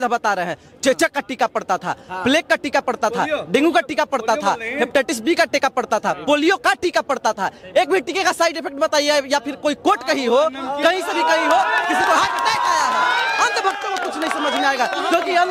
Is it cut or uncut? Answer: uncut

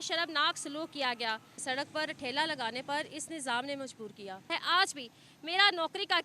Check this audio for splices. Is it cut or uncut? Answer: cut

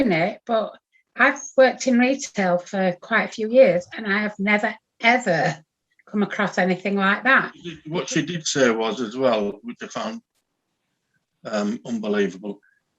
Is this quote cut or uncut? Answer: cut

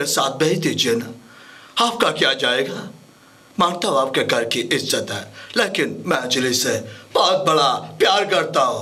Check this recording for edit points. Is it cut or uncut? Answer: uncut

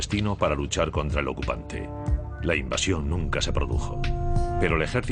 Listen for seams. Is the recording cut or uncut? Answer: uncut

